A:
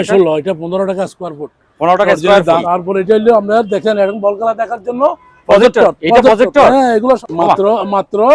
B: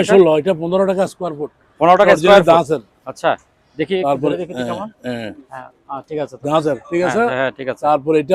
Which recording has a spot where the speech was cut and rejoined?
A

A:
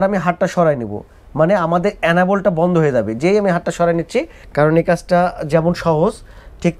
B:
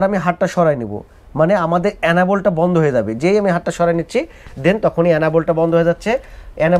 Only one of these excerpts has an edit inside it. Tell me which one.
A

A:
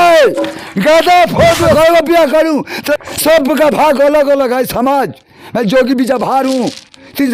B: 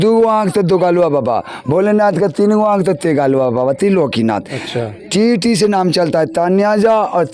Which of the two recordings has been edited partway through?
A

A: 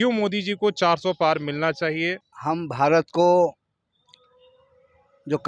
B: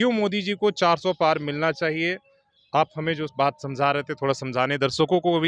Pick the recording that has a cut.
A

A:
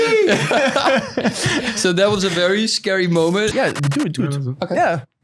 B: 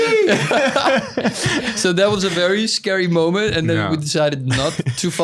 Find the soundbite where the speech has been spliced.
A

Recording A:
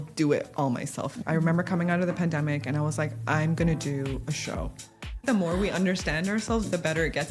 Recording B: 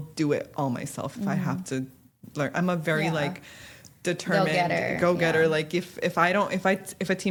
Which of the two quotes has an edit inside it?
A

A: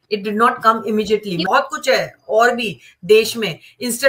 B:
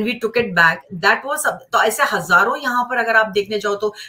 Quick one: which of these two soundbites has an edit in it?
A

